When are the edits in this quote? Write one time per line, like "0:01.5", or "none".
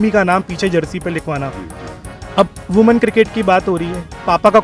none